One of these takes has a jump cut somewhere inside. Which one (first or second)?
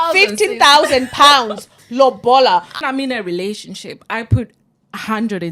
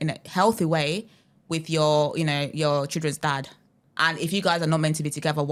first